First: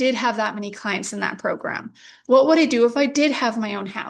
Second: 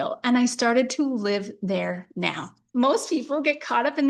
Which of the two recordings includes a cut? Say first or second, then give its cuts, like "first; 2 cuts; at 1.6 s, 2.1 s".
second; 1 cut; at 2.6 s